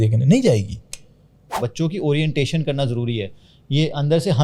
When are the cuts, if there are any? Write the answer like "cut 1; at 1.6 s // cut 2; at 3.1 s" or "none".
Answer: cut 1; at 1.6 s